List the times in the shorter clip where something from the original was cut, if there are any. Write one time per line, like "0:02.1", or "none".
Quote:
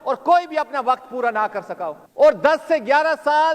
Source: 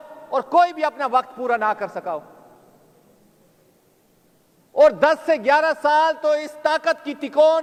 0:02.0